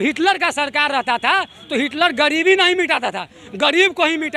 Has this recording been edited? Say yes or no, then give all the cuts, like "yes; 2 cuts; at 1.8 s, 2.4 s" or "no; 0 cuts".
no; 0 cuts